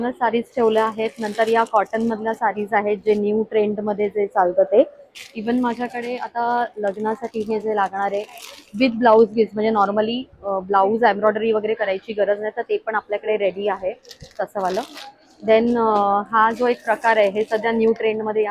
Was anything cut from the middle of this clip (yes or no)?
no